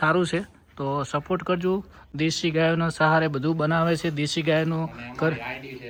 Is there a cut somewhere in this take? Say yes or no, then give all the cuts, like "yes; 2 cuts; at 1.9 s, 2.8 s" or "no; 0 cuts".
no; 0 cuts